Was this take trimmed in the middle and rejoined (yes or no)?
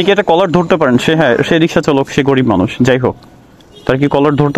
no